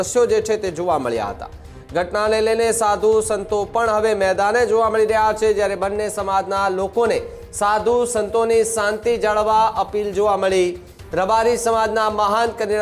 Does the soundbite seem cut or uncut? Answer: uncut